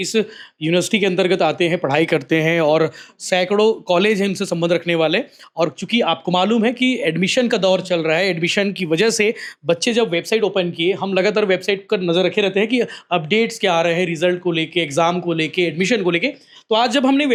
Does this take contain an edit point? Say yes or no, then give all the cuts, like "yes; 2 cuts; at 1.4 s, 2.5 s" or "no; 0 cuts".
no; 0 cuts